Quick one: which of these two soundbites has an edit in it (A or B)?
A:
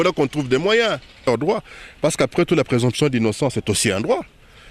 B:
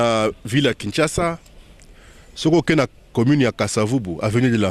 A